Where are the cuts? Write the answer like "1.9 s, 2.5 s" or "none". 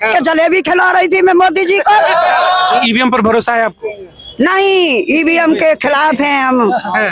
2.8 s